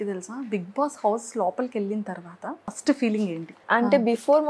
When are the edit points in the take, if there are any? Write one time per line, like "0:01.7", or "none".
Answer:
0:02.7
0:03.6